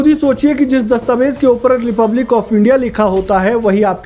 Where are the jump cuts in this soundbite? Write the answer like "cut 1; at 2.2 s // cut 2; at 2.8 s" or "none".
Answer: none